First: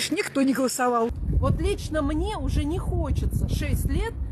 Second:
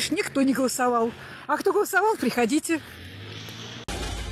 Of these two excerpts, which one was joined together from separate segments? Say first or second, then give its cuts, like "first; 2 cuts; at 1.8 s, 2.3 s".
first; 1 cut; at 1.2 s